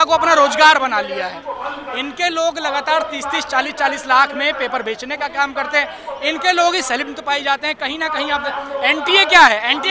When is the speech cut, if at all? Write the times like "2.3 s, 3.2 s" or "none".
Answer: none

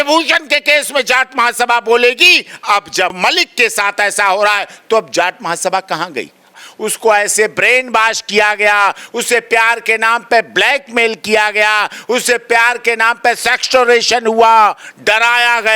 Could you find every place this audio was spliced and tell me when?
3.2 s, 6.7 s

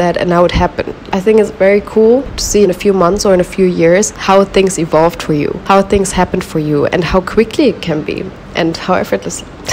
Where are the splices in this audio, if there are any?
1.1 s, 2.5 s, 4.1 s, 5.6 s

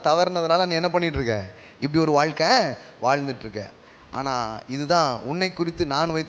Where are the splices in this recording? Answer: none

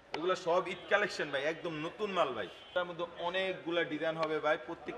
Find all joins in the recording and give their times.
2.7 s

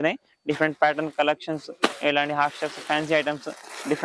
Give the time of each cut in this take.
none

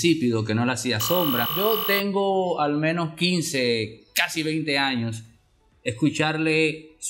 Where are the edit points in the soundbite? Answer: 1.5 s

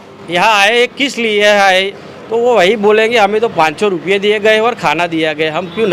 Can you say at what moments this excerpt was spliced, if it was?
none

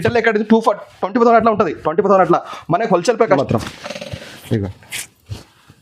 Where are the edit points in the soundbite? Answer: 3.4 s

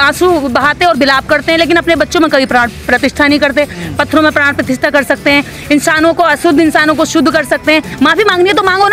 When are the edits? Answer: 7.9 s

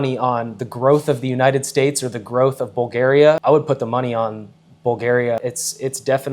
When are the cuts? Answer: 3.4 s, 5.4 s

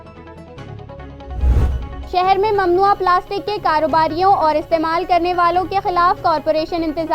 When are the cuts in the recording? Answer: 1.6 s

